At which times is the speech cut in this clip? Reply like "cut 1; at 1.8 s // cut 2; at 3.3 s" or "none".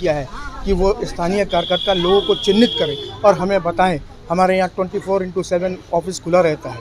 none